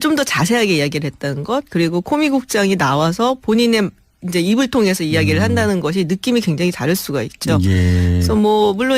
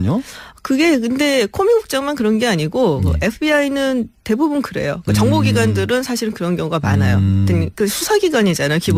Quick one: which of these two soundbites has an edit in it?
first; 1 cut; at 2.9 s

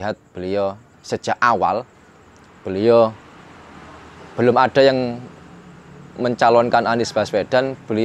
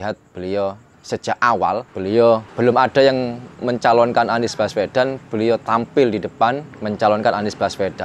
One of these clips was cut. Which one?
second; 4 cuts; at 1.9 s, 2.5 s, 3.4 s, 6.7 s

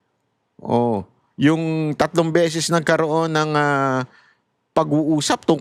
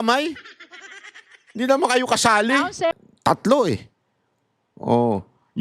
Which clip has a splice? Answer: second; 1 cut; at 3.0 s

